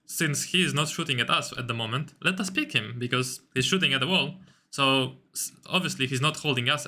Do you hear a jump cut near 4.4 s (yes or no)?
no